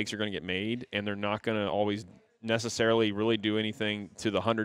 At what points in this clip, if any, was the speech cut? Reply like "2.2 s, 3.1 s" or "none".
none